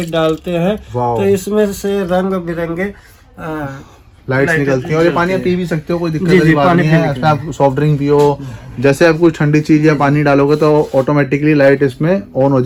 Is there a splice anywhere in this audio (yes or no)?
no